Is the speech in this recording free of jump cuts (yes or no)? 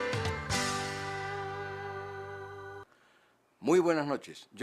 yes